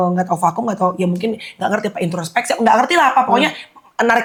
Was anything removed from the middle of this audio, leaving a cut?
no; 0 cuts

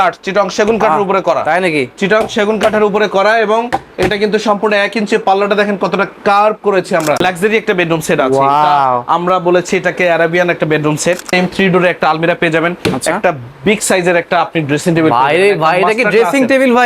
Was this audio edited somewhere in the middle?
yes; 2 cuts; at 7.2 s, 11.3 s

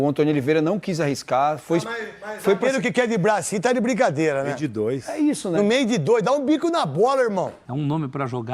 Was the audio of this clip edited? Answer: yes; 1 cut; at 7.6 s

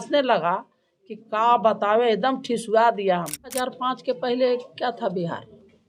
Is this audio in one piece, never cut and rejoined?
no; 1 cut; at 3.7 s

